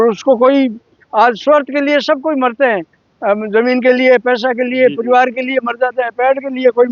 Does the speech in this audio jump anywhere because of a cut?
no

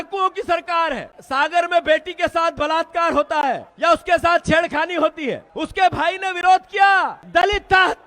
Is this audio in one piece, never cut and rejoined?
no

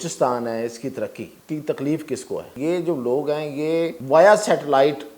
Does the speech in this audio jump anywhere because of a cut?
yes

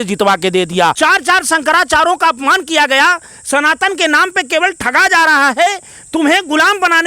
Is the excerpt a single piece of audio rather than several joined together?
no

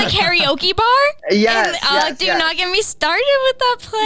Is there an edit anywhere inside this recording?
yes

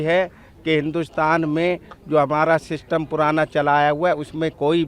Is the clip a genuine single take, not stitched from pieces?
yes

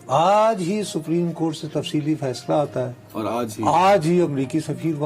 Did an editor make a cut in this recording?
no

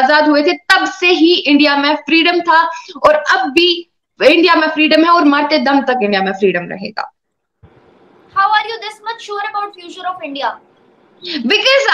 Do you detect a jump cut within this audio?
no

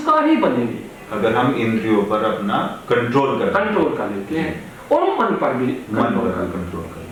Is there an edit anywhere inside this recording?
no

